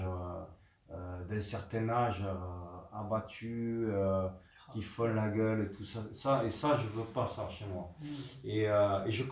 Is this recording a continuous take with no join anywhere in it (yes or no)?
yes